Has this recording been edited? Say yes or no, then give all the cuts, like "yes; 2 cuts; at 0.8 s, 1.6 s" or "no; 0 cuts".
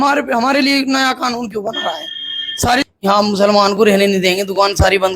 yes; 1 cut; at 2.8 s